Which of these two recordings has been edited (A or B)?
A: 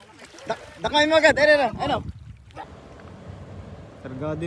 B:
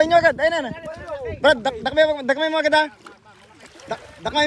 A